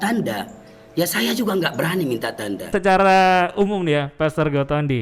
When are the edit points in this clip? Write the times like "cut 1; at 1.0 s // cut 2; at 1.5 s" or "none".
cut 1; at 2.7 s